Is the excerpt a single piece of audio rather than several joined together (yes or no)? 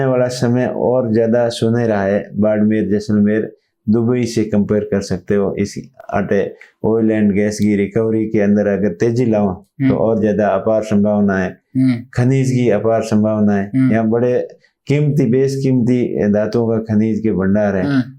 yes